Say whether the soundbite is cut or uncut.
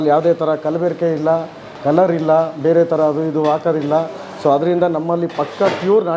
uncut